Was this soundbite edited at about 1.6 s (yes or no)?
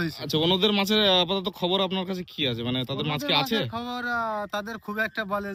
no